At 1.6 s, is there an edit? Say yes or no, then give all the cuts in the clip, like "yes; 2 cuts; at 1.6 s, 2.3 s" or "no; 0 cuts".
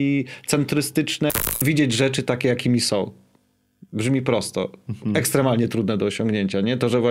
yes; 1 cut; at 1.6 s